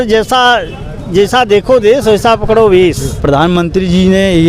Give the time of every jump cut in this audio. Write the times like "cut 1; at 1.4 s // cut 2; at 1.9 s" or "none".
cut 1; at 3.1 s